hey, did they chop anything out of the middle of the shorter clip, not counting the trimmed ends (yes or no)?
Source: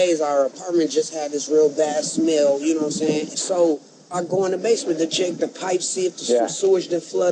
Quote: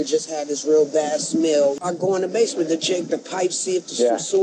yes